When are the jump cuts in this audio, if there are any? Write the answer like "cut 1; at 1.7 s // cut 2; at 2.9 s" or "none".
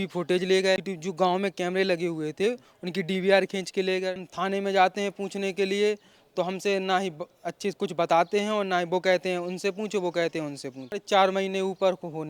cut 1; at 0.8 s // cut 2; at 4.3 s // cut 3; at 11.0 s